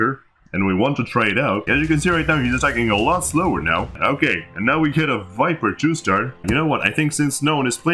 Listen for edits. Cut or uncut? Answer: cut